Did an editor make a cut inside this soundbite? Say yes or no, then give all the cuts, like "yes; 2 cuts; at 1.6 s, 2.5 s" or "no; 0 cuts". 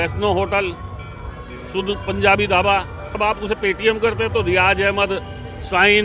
yes; 1 cut; at 3.2 s